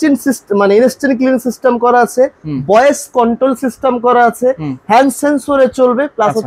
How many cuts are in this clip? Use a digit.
0